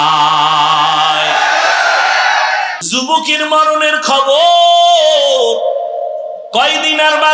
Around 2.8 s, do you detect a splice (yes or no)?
yes